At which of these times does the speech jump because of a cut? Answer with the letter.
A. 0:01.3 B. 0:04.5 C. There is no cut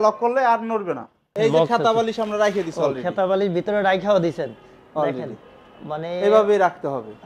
A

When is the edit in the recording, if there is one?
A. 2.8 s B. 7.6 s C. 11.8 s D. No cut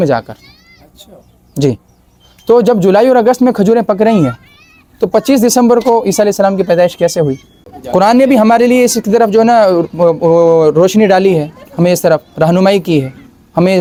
D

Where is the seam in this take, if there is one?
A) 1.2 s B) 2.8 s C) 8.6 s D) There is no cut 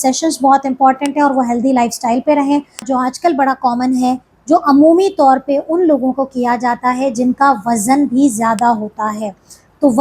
B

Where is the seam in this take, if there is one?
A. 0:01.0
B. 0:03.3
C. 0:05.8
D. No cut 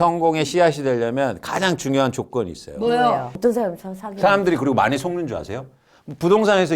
B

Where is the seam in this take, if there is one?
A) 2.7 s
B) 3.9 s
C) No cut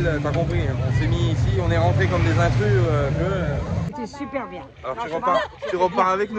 B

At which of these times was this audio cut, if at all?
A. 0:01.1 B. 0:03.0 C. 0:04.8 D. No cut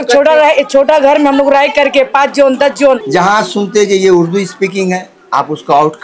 B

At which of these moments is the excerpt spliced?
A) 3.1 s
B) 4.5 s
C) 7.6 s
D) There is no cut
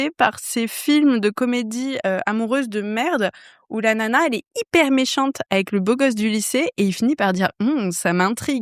D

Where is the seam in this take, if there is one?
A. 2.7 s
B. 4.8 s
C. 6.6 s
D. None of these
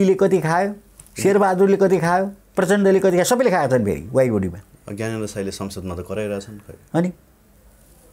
D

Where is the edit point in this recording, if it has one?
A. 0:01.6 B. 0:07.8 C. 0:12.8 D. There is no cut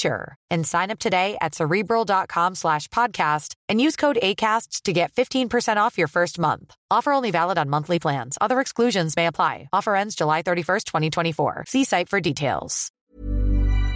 C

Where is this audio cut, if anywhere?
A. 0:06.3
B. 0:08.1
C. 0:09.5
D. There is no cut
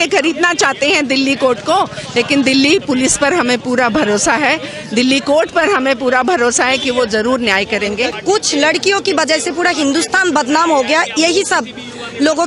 B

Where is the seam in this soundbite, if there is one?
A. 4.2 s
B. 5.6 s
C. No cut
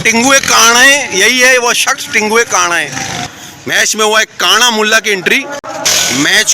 B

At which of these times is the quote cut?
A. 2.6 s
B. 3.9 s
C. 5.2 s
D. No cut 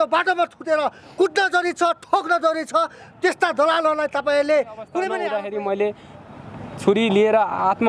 C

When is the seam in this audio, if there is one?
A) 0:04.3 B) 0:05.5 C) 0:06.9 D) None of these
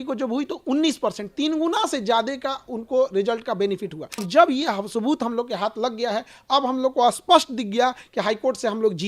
A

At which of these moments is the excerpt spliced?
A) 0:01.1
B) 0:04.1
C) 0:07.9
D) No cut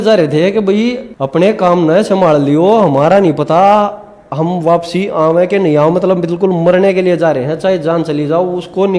A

